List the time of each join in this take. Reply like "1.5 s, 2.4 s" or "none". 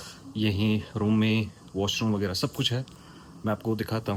none